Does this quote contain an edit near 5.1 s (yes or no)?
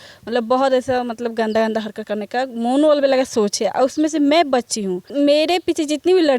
yes